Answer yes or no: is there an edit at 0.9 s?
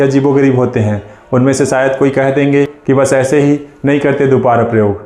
no